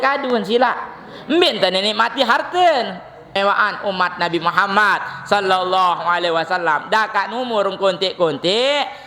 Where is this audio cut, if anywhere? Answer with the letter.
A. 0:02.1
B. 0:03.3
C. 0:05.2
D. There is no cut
B